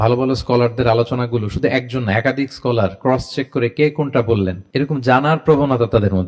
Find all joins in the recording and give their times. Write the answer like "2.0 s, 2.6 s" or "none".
none